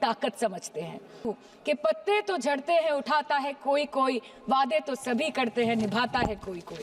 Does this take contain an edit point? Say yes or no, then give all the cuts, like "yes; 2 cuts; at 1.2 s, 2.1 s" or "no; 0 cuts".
yes; 1 cut; at 1.2 s